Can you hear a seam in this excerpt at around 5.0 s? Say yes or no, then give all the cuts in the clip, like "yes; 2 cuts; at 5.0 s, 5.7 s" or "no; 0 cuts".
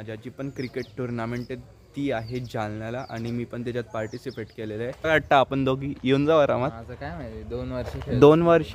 yes; 1 cut; at 5.0 s